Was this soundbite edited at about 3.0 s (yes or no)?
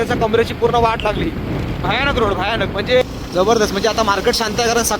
yes